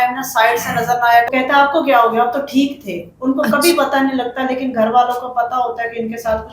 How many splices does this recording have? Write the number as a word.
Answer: one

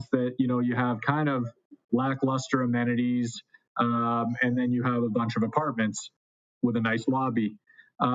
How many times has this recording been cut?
zero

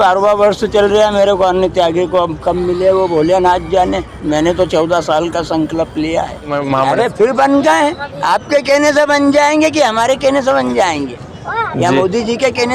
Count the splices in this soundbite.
one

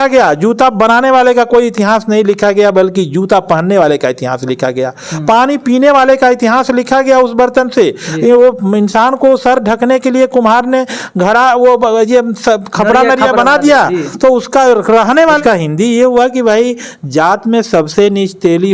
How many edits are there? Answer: one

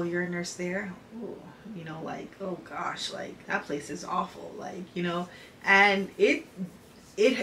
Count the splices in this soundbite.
zero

